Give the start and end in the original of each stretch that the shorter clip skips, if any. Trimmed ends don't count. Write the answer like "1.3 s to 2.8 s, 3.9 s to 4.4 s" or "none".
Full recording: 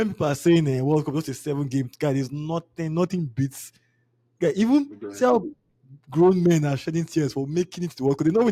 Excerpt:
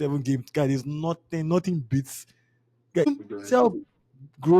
4.5 s to 4.8 s